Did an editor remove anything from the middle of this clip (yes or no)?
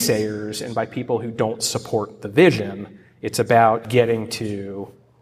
yes